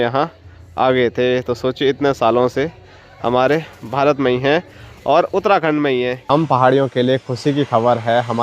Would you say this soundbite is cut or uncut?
cut